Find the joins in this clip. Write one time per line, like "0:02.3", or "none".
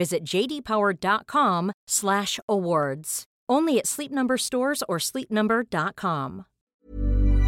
0:06.5